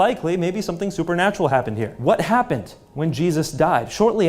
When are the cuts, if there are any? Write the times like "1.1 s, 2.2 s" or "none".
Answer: 1.9 s

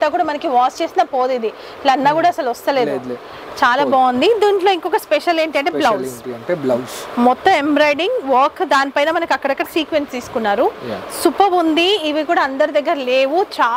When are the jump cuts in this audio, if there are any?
none

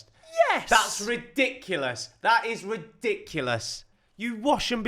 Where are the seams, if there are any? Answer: 3.8 s

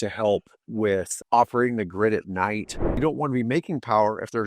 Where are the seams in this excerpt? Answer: 2.8 s

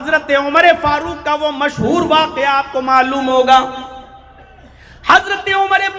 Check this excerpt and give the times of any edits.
none

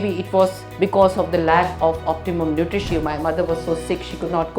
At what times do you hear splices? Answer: 2.9 s

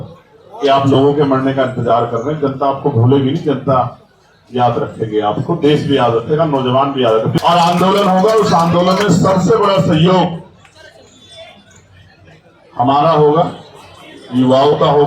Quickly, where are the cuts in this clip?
7.3 s

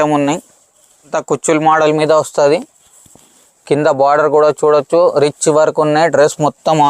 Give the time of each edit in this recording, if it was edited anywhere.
1.1 s

